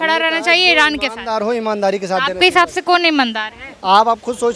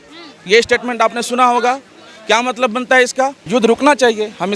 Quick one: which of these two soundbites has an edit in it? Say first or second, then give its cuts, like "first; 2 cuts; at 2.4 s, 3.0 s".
second; 1 cut; at 3.4 s